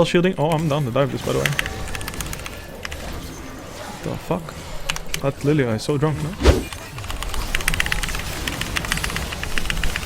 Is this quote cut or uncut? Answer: cut